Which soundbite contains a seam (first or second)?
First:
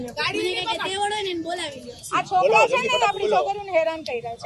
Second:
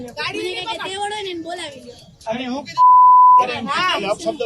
first